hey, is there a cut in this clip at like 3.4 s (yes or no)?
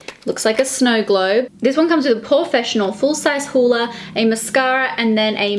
no